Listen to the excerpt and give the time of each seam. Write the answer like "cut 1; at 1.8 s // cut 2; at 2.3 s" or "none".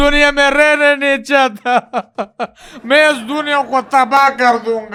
none